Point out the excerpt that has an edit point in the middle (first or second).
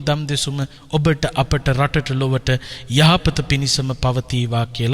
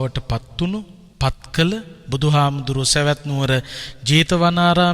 second